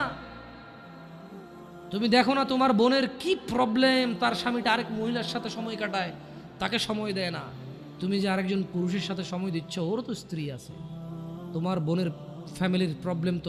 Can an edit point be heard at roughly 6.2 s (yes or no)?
no